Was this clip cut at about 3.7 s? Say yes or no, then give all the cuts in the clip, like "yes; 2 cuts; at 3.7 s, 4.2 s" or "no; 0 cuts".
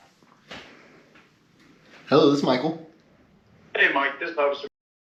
no; 0 cuts